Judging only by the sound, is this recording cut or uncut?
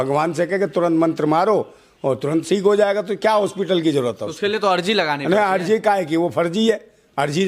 uncut